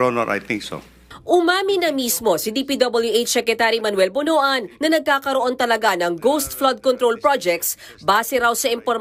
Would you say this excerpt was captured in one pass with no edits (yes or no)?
yes